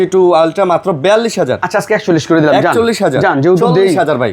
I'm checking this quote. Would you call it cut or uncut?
uncut